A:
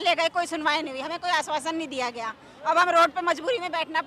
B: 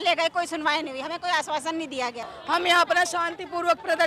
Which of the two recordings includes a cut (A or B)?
B